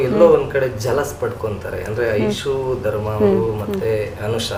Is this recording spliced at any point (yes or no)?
no